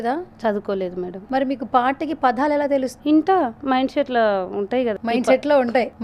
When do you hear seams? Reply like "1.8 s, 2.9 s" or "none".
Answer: 1.2 s, 2.9 s, 4.9 s